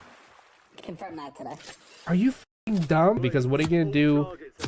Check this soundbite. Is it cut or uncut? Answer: cut